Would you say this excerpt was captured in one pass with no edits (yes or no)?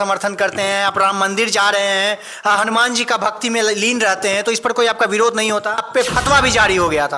no